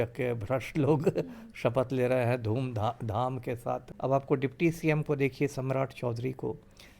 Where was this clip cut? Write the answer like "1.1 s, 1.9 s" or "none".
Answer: 3.9 s